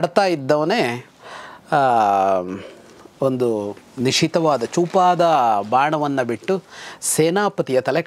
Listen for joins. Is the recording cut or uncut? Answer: uncut